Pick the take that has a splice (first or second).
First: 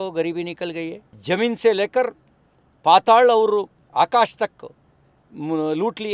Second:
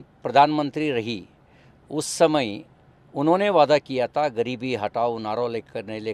first